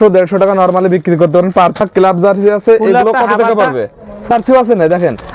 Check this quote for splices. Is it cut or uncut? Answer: cut